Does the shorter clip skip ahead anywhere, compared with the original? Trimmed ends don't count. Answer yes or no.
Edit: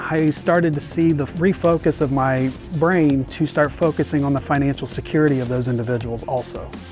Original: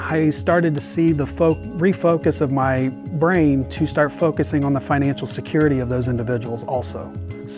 yes